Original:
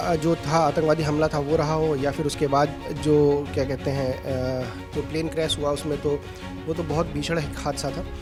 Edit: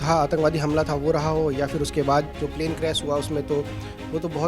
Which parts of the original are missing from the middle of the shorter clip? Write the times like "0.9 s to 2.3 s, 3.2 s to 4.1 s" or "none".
2.8 s to 4.9 s